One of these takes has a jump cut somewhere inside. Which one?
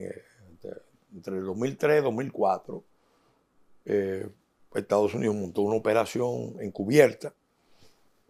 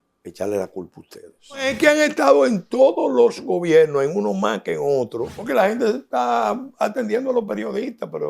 second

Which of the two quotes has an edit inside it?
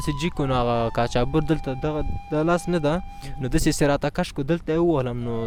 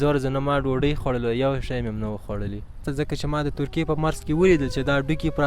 second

